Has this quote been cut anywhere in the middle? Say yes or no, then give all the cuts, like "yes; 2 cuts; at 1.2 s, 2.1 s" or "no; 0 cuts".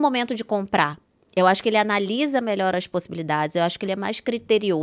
no; 0 cuts